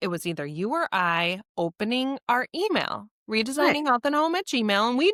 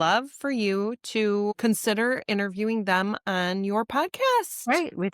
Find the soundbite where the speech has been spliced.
second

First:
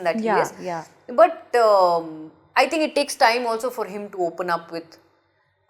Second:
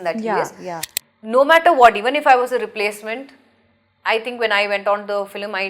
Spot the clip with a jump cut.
second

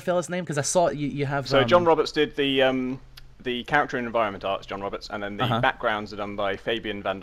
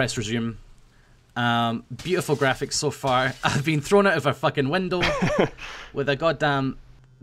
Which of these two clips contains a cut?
second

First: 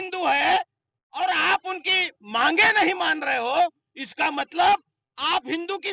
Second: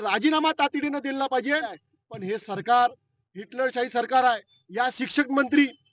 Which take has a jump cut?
second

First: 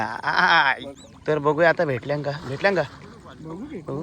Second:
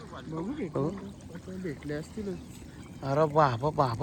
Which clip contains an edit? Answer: first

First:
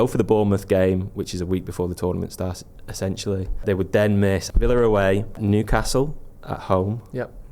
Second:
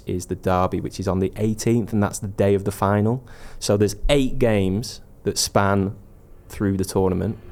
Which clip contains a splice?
first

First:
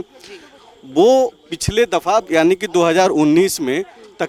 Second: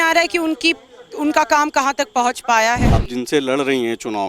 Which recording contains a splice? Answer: second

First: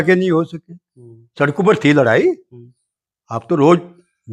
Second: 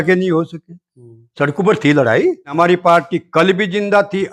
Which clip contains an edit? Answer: second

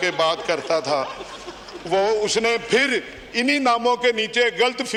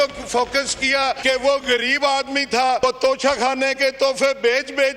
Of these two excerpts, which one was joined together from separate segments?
second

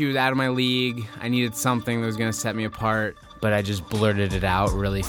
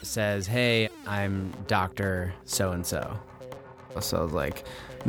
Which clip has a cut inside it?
first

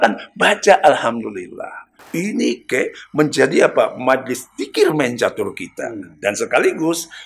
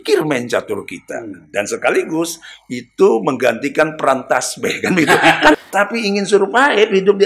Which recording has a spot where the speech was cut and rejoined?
second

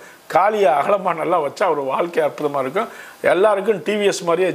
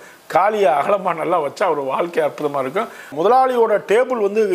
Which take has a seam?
second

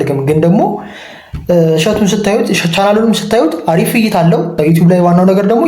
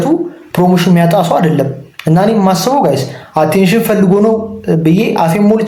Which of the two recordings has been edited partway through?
first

